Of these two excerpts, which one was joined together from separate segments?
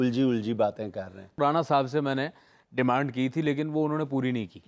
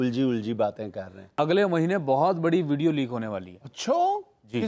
second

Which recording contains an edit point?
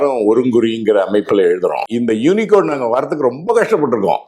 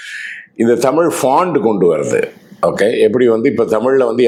first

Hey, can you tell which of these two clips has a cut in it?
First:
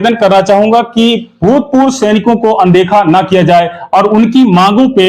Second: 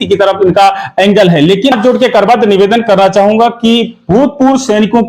second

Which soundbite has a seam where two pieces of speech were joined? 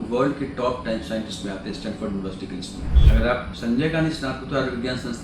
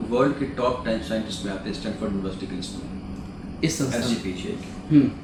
first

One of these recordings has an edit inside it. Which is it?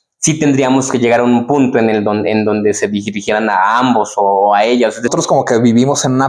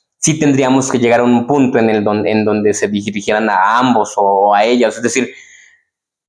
first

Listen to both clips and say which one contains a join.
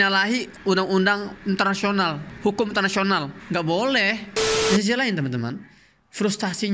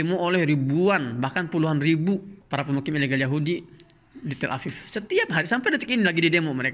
first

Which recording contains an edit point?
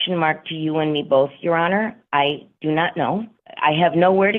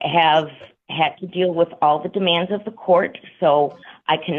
first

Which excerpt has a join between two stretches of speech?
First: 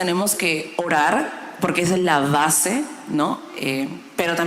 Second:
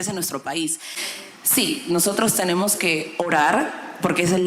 second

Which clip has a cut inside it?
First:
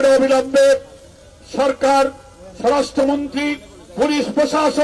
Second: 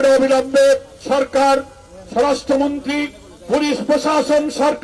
second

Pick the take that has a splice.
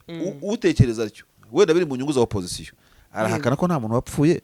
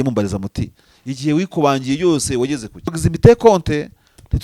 second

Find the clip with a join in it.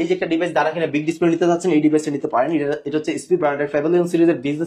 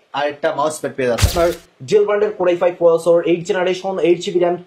second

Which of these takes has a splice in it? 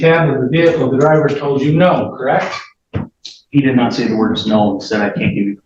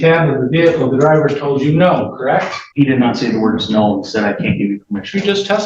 second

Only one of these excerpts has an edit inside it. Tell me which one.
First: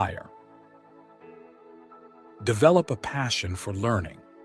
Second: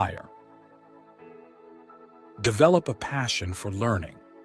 first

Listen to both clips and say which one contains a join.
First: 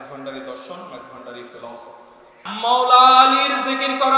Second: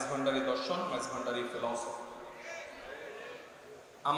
first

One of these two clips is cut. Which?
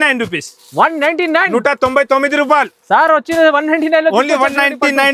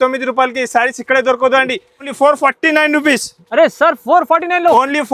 second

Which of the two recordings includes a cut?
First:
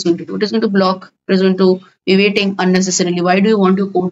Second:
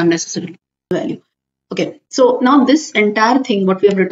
second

